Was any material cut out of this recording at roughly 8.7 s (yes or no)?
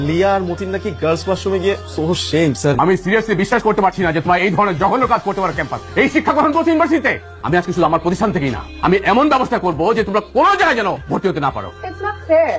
no